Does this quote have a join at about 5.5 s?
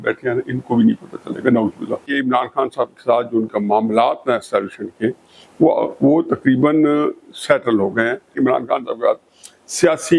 no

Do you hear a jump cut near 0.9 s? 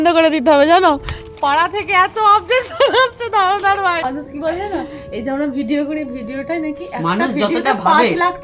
no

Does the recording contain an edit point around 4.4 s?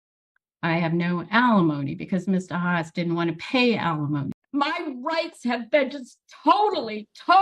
yes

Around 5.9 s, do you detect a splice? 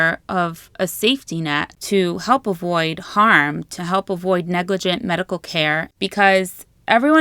yes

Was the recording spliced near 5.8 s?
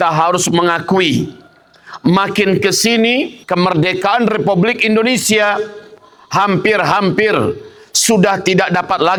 no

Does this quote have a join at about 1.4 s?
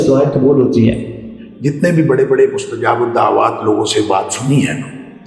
yes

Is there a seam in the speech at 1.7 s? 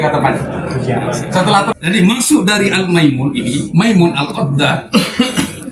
yes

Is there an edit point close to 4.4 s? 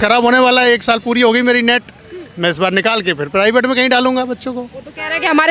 no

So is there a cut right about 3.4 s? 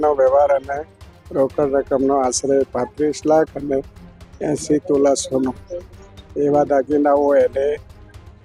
no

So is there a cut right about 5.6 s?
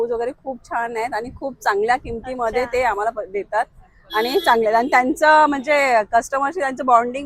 no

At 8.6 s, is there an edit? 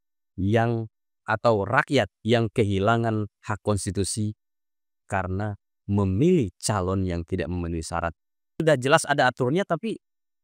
yes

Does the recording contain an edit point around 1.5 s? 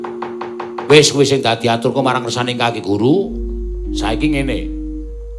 no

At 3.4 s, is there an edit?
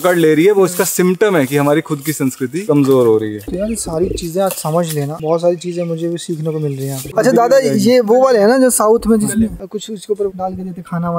no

